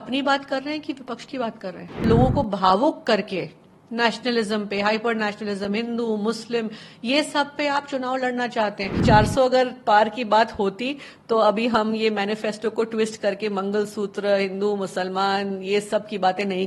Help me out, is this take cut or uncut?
cut